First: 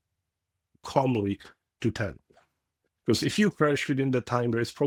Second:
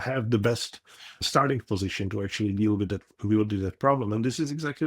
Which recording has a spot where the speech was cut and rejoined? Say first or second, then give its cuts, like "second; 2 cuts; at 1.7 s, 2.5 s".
second; 1 cut; at 1.2 s